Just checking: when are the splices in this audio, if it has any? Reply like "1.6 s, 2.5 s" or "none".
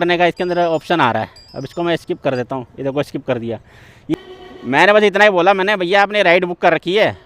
4.1 s